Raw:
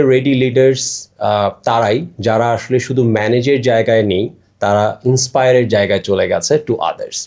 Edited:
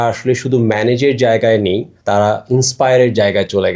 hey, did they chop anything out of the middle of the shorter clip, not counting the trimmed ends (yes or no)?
yes